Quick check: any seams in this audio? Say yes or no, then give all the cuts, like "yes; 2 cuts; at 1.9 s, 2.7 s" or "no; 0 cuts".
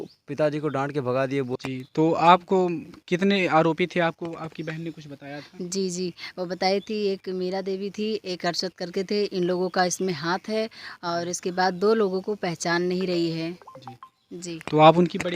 yes; 1 cut; at 1.5 s